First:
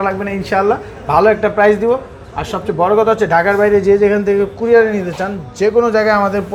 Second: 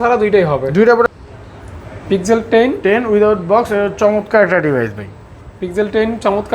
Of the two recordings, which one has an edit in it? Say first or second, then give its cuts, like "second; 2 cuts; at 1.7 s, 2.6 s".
second; 1 cut; at 1.1 s